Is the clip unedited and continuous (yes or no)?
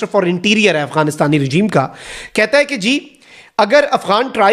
yes